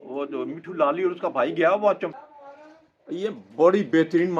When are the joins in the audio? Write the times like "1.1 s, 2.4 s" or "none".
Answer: 2.1 s